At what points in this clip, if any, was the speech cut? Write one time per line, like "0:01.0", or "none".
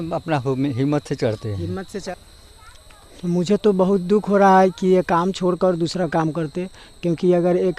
0:02.0